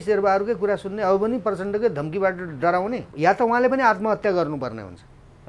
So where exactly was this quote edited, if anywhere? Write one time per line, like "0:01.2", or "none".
0:03.1